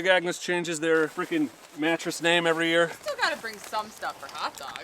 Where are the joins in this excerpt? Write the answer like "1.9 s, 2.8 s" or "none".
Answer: 1.2 s, 3.0 s